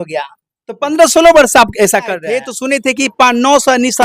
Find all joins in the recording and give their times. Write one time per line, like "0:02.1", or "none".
0:02.5